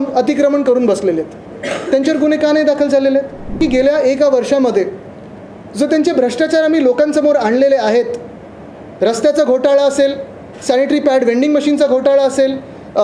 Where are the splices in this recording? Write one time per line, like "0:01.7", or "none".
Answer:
0:03.6